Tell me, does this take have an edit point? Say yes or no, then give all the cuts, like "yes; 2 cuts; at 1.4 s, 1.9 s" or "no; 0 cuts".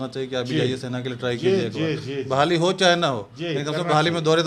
no; 0 cuts